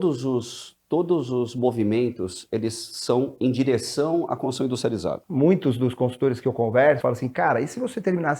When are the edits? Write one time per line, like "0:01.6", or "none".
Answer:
0:05.2
0:07.0